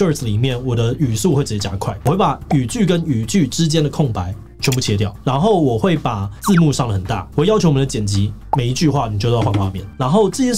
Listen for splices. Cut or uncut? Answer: uncut